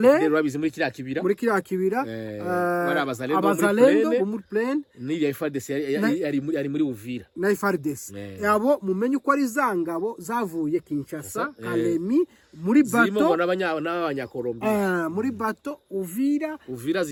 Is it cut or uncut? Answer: uncut